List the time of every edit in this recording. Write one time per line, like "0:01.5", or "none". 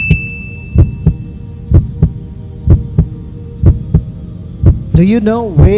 none